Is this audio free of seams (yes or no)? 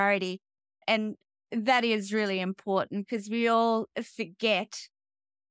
yes